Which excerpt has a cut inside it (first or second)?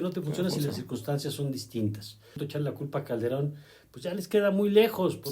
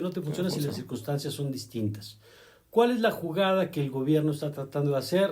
first